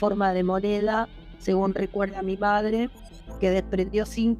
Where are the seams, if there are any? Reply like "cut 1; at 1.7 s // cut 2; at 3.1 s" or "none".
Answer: none